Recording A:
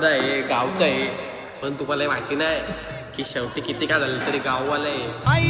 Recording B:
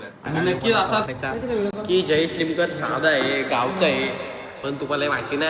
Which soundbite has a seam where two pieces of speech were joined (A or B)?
B